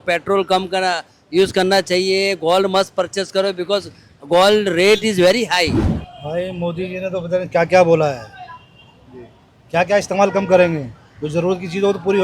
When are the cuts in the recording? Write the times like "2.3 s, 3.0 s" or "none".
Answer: 5.9 s